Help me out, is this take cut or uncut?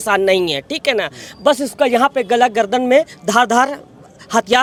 uncut